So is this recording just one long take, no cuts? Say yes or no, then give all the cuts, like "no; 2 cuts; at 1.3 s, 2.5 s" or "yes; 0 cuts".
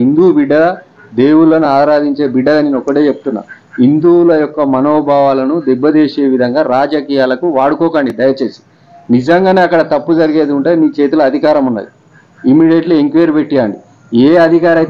yes; 0 cuts